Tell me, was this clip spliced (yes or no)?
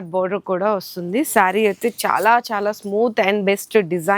no